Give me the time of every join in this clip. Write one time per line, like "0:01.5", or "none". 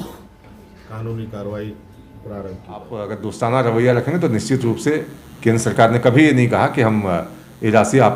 0:03.1